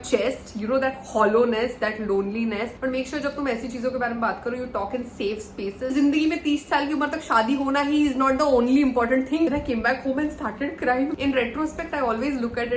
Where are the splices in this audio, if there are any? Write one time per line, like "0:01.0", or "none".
0:02.7
0:05.9
0:09.5
0:11.1